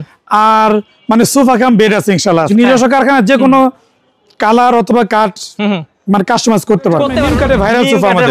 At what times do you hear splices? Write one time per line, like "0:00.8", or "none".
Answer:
0:02.5
0:07.3